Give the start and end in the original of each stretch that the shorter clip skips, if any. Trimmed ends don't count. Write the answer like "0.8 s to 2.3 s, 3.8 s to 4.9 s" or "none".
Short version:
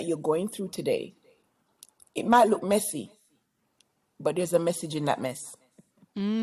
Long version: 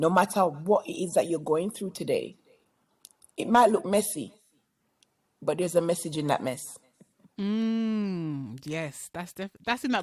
none